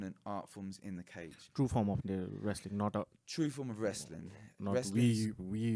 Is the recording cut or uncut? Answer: uncut